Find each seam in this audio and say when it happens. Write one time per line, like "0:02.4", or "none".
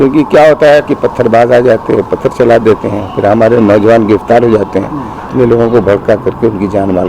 0:05.3